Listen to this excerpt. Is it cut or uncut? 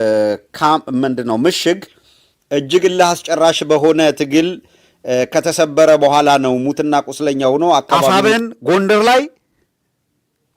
cut